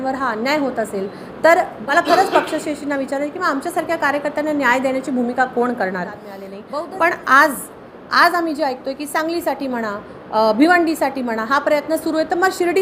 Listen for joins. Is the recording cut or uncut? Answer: cut